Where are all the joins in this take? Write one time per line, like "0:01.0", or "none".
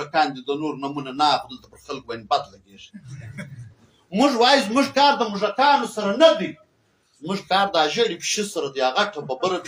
none